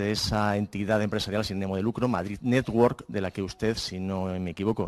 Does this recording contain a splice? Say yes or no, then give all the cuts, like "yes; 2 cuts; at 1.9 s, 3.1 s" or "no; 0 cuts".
no; 0 cuts